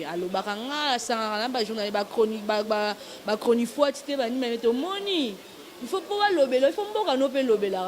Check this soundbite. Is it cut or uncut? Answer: uncut